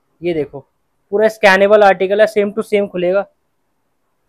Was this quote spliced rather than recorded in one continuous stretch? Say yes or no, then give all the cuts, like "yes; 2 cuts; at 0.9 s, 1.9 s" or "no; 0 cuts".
no; 0 cuts